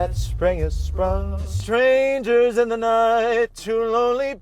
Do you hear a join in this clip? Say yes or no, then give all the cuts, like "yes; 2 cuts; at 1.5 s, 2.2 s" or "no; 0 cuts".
yes; 1 cut; at 1.5 s